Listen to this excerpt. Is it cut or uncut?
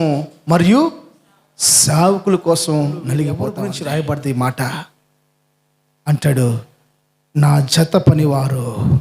cut